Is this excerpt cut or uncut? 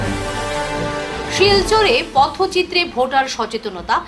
uncut